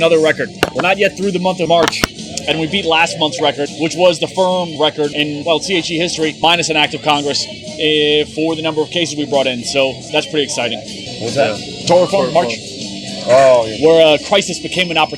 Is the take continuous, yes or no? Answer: yes